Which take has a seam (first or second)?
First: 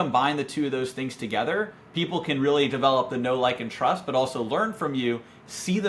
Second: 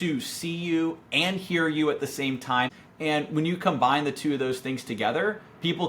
second